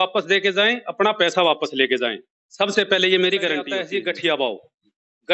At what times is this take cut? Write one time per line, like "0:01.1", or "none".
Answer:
0:03.8